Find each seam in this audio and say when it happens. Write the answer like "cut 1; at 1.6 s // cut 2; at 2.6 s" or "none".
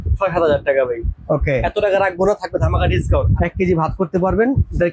cut 1; at 3.3 s